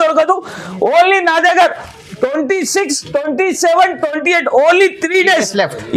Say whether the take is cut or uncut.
uncut